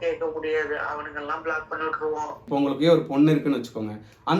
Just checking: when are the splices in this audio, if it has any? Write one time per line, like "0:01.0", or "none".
0:02.4